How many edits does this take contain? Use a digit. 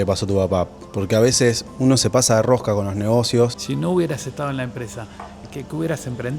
2